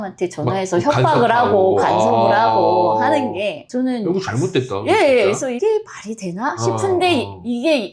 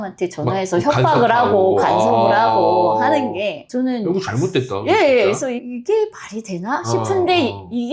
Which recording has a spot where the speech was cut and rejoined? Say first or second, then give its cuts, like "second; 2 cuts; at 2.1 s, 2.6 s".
first; 1 cut; at 5.6 s